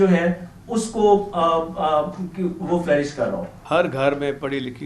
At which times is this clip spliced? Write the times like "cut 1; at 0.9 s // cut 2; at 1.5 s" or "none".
cut 1; at 3.5 s